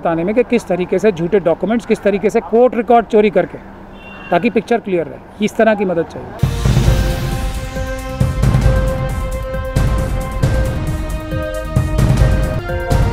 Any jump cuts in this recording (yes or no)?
no